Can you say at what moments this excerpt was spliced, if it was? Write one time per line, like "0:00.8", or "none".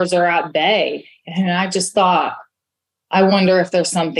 none